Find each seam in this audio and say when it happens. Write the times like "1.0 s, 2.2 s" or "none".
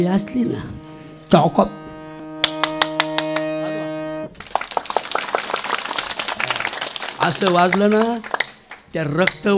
2.2 s